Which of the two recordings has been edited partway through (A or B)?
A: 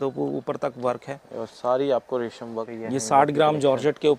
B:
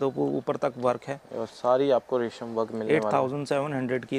A